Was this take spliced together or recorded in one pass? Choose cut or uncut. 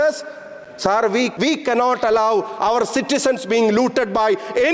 cut